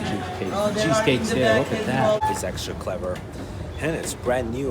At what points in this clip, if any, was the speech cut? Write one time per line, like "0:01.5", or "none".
0:02.2